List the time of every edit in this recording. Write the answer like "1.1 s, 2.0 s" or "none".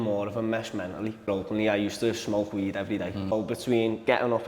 1.2 s, 3.3 s